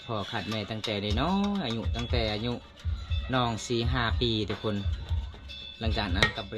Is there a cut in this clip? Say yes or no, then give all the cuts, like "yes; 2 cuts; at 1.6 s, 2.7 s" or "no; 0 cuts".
no; 0 cuts